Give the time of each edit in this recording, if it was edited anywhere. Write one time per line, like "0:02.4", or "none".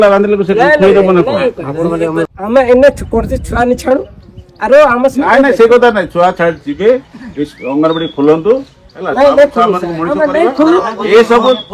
0:02.3